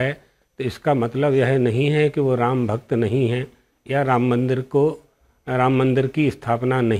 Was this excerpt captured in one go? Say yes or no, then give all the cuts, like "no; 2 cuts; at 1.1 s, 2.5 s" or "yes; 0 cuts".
yes; 0 cuts